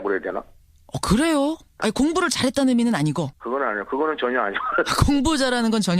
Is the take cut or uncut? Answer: uncut